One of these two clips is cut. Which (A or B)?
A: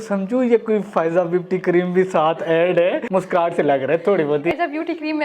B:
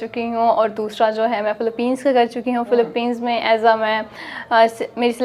A